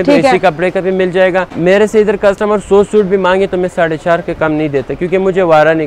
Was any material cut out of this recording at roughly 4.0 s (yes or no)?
no